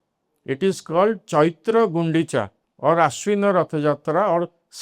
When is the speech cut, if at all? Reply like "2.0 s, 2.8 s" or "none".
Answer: 2.6 s